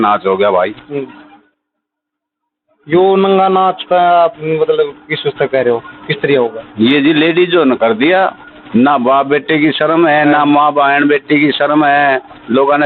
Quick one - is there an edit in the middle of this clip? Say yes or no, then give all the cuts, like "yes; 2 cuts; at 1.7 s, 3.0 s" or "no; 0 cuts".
no; 0 cuts